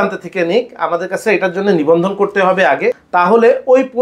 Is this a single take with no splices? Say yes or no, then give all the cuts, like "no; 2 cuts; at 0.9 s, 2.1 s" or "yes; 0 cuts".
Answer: no; 1 cut; at 3.0 s